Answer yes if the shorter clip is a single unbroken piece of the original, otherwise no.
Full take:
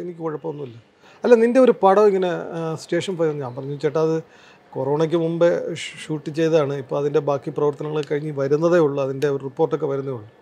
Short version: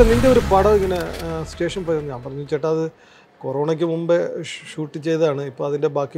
yes